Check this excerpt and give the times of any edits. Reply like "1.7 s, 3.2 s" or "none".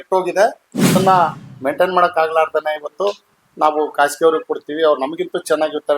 0.9 s